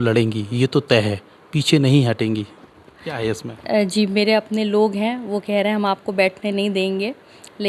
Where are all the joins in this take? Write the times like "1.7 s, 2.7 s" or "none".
none